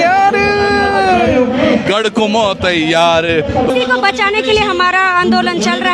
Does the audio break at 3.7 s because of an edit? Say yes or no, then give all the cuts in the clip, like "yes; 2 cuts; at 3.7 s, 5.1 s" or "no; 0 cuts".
yes; 1 cut; at 3.7 s